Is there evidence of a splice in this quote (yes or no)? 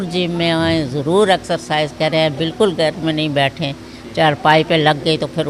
no